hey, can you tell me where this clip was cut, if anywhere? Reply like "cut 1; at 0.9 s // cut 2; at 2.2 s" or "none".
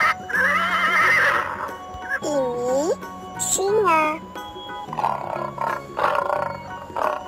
none